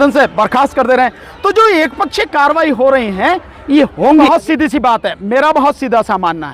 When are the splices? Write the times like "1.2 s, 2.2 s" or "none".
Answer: 3.9 s